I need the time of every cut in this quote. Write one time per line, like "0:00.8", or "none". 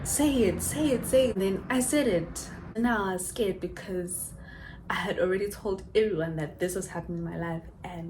0:01.4
0:02.7